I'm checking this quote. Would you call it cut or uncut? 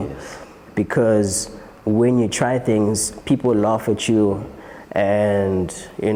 uncut